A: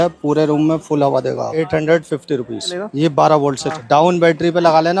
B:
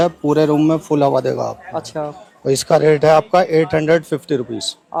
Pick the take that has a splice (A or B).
A